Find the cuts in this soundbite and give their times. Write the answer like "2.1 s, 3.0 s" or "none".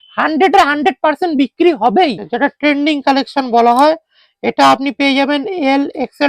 2.3 s